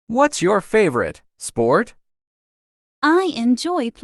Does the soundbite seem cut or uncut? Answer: cut